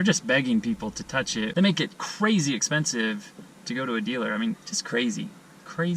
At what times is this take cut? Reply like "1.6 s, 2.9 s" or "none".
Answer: none